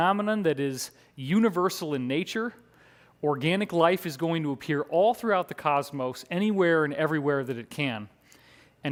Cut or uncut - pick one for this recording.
uncut